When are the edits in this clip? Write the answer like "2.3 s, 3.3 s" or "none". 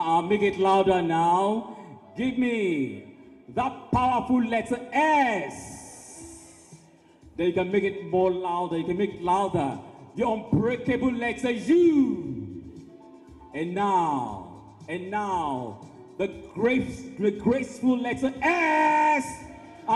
none